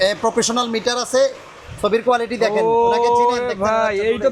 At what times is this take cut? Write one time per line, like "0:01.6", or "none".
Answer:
none